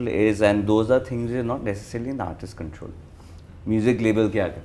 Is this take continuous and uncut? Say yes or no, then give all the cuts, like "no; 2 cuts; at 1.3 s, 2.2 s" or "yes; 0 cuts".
yes; 0 cuts